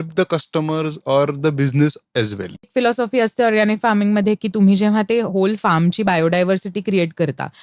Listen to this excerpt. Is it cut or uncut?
cut